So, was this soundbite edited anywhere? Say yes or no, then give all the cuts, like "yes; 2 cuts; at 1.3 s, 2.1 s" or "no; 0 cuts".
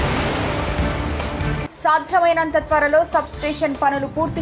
yes; 1 cut; at 1.3 s